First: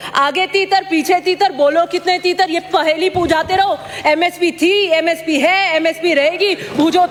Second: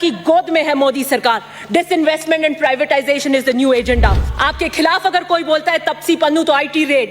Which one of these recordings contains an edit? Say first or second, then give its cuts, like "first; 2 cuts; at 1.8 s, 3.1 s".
second; 1 cut; at 4.3 s